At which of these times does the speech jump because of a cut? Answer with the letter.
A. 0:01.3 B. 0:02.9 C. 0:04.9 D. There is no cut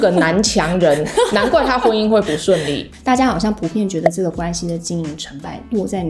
B